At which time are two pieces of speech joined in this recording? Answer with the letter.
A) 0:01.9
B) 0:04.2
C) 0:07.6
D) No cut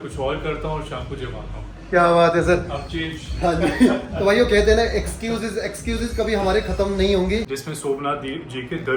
C